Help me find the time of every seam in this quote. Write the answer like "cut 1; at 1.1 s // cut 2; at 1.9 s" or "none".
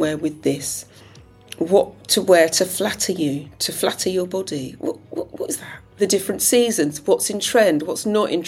cut 1; at 5.9 s